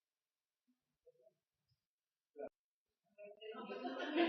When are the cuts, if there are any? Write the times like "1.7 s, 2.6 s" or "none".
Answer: none

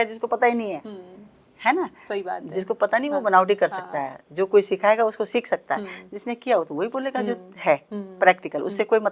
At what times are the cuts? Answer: none

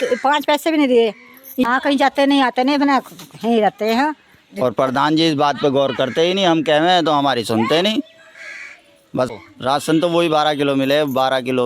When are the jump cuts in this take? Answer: 1.6 s, 9.3 s

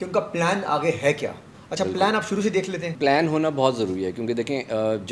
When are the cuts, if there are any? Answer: 2.9 s

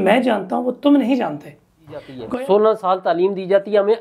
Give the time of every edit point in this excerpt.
2.2 s

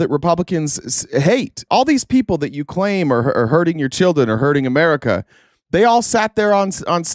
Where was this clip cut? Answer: 1.6 s

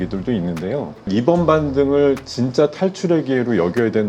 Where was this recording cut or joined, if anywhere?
1.1 s

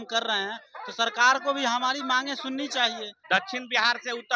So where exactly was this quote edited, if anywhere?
3.1 s

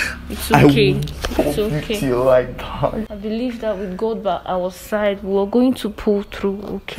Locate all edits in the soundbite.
3.1 s

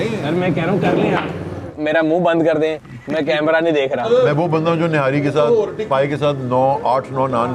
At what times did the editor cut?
1.8 s, 4.1 s

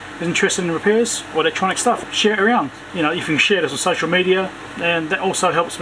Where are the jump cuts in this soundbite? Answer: 2.0 s, 4.6 s

